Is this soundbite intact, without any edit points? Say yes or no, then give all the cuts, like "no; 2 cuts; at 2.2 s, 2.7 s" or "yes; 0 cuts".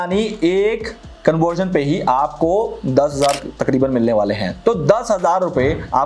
yes; 0 cuts